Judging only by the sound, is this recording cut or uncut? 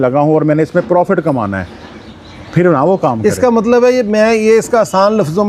uncut